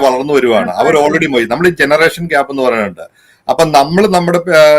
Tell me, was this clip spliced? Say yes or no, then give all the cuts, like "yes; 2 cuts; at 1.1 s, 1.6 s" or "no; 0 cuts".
no; 0 cuts